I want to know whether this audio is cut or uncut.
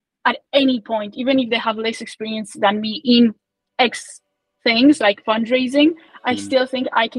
uncut